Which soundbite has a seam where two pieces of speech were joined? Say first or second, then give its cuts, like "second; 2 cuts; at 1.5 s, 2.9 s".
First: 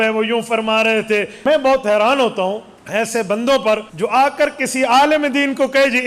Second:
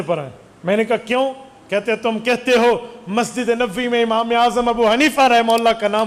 first; 3 cuts; at 1.3 s, 2.7 s, 3.9 s